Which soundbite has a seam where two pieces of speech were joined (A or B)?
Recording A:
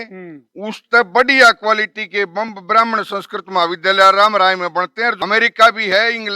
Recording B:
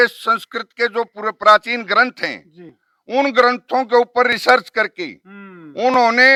A